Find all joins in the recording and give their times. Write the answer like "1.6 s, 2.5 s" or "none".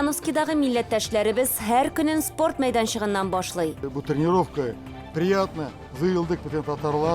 3.9 s

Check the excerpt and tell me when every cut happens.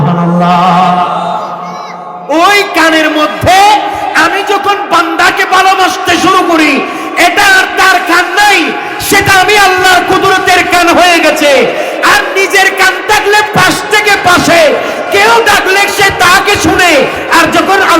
2.1 s

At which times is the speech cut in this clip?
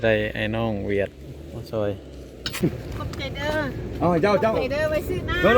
2.6 s

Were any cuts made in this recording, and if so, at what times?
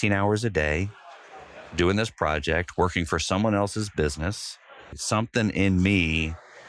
5.0 s

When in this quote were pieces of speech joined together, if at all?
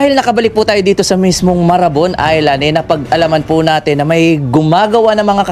none

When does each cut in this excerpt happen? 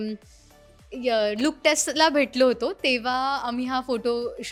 none

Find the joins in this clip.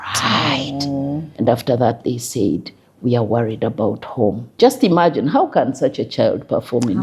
1.3 s, 4.6 s

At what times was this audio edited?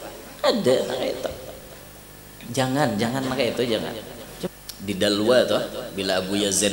4.5 s

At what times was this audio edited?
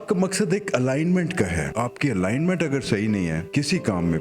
1.7 s, 3.5 s

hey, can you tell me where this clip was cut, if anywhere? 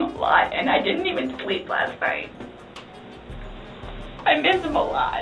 none

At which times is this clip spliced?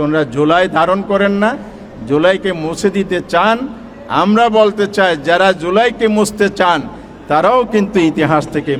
none

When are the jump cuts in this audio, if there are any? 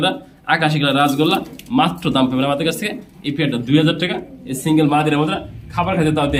none

